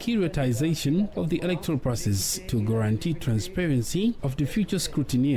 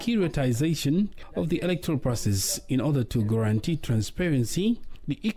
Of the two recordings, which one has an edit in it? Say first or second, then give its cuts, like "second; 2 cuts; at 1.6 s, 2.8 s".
first; 3 cuts; at 1.1 s, 2.4 s, 4.3 s